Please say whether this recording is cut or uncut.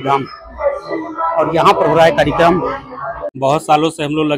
cut